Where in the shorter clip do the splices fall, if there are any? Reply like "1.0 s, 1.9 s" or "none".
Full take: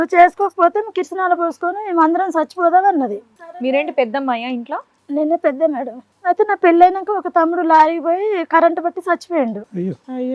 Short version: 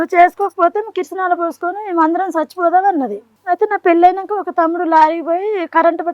3.3 s